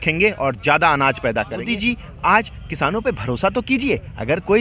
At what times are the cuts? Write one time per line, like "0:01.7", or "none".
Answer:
0:01.7